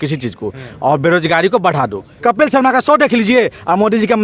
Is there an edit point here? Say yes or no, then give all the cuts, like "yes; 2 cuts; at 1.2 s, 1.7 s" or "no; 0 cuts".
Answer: yes; 1 cut; at 2.1 s